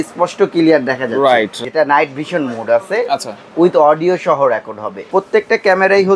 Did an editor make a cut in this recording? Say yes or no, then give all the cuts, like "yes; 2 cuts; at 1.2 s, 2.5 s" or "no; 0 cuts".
yes; 2 cuts; at 1.5 s, 5.1 s